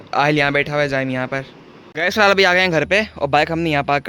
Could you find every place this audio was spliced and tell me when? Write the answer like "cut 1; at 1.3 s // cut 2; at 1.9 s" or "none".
cut 1; at 1.9 s